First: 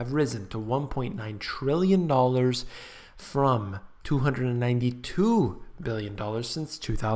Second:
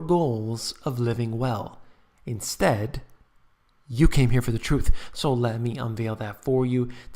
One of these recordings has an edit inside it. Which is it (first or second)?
second